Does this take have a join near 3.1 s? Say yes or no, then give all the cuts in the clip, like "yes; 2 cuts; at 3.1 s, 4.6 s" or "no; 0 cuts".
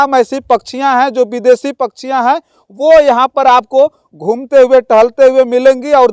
no; 0 cuts